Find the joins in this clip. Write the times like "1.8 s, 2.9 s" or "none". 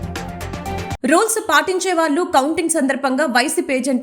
1.0 s

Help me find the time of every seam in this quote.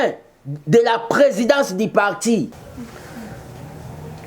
2.6 s

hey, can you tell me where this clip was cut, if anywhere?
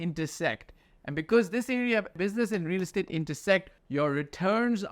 2.2 s, 3.8 s

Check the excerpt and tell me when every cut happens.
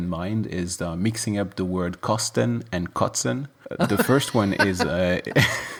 none

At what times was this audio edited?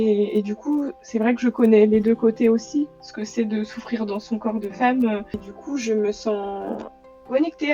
5.5 s

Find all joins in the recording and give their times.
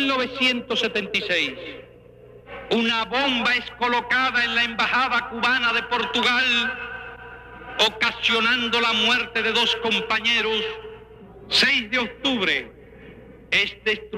4.9 s

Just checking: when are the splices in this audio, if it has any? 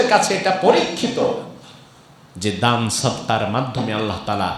none

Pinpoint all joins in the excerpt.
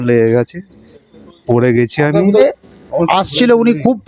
2.4 s

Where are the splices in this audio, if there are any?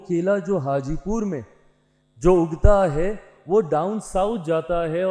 none

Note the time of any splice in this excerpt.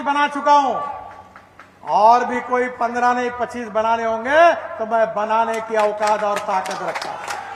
none

